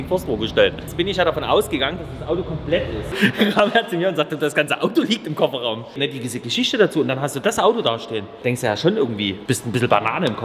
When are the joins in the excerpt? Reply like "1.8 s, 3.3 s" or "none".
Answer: 0.8 s, 3.1 s, 6.0 s, 8.3 s, 9.4 s